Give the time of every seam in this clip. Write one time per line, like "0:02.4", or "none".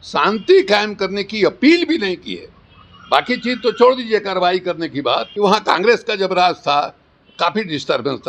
0:05.3